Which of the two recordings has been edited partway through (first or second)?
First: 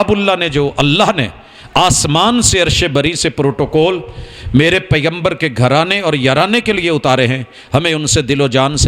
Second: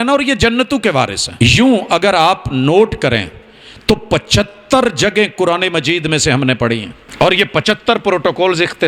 second